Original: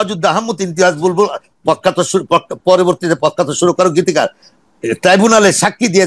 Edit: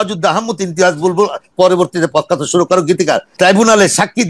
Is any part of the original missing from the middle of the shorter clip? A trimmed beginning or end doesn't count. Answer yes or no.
yes